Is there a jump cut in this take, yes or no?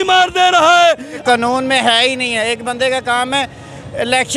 yes